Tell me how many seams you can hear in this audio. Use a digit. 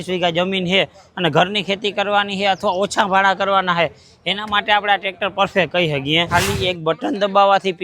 1